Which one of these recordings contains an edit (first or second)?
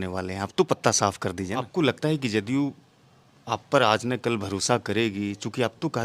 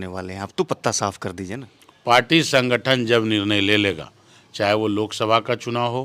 first